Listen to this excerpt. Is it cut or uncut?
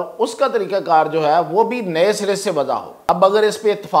cut